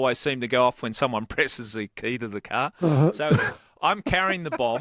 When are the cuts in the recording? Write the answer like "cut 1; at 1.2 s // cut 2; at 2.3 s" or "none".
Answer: none